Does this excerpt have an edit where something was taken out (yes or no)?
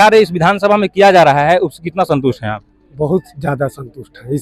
no